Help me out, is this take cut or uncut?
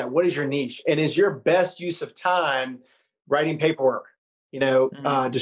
uncut